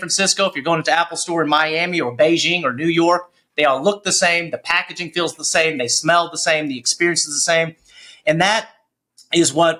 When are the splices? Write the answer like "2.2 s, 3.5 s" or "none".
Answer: none